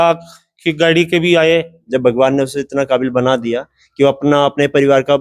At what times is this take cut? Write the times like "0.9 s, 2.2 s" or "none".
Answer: 1.8 s